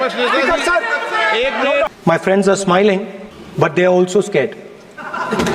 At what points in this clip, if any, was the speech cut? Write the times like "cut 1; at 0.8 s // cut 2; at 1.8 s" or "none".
cut 1; at 1.9 s